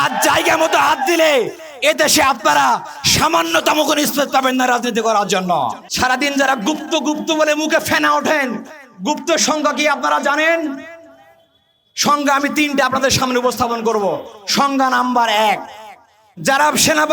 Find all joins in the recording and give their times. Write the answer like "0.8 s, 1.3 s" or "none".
5.8 s